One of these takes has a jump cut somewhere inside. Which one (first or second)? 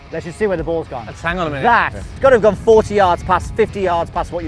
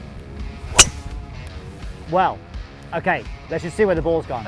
first